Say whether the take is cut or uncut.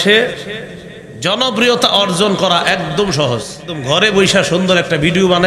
cut